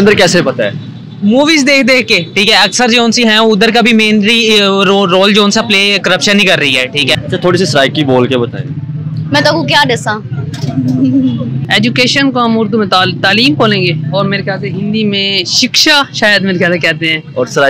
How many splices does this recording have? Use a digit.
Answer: 2